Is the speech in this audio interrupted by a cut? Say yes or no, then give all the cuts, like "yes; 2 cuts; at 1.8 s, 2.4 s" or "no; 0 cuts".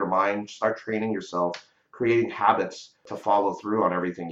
yes; 1 cut; at 3.1 s